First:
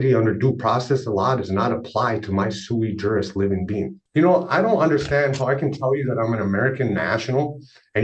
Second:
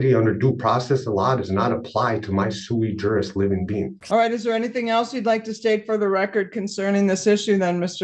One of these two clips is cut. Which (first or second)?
first